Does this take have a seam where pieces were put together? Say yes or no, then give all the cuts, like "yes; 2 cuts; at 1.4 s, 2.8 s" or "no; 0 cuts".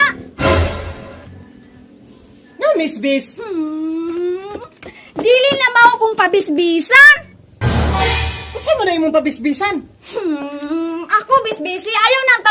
no; 0 cuts